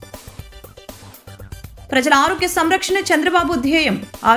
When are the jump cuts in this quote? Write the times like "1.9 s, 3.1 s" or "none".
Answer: 1.9 s